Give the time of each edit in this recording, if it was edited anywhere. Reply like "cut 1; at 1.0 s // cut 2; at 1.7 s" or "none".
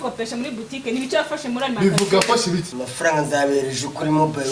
cut 1; at 2.8 s

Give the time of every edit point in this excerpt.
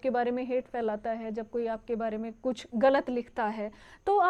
none

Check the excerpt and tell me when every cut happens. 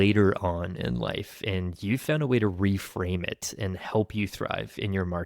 none

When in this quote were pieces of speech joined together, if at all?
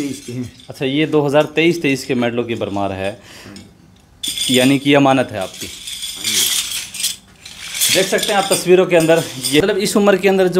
cut 1; at 9.6 s

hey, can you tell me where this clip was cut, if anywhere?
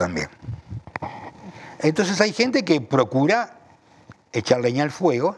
none

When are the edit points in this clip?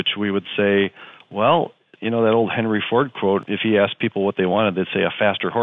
cut 1; at 1.9 s // cut 2; at 3.4 s

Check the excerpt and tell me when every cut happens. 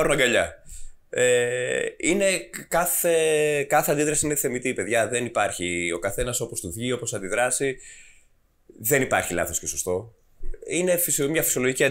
none

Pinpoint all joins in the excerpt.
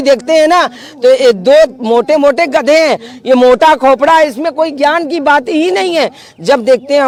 none

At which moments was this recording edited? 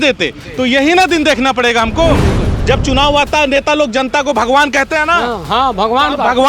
cut 1; at 2.5 s

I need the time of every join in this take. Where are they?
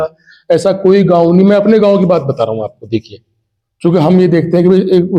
none

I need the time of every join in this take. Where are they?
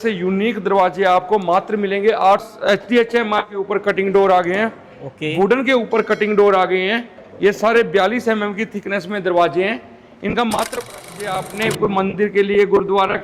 cut 1; at 2.4 s // cut 2; at 10.8 s

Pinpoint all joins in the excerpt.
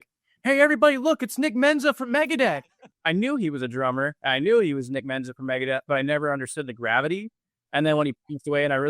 cut 1; at 2.9 s

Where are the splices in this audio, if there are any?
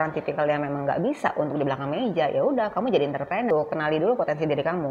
cut 1; at 3.5 s

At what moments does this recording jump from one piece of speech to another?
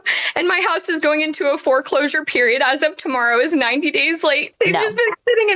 cut 1; at 4.5 s

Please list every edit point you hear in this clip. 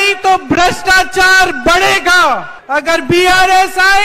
none

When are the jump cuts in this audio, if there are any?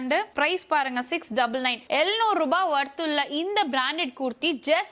none

